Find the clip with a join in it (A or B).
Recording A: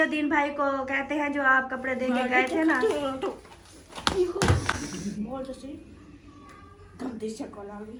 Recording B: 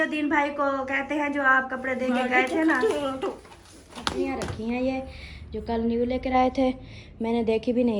B